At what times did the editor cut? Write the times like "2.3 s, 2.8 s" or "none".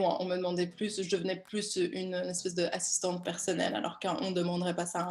none